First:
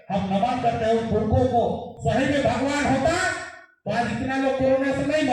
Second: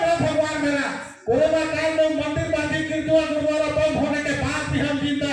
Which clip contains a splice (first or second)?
first